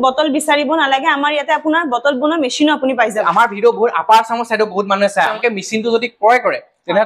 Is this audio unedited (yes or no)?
no